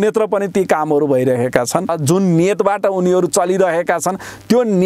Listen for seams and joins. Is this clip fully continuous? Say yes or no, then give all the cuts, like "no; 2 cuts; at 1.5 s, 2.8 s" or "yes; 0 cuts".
no; 1 cut; at 2.0 s